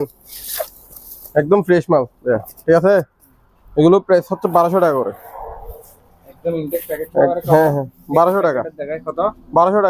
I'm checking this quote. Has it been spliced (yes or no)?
no